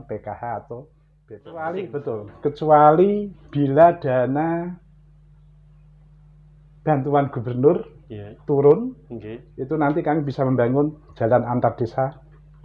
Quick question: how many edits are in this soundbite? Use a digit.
1